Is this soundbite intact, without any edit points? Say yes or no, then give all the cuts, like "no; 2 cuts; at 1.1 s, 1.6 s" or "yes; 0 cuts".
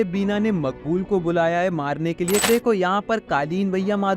no; 1 cut; at 2.5 s